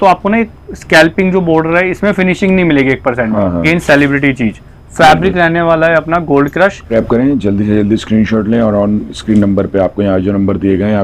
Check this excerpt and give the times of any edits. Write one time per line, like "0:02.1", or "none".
0:03.6
0:06.8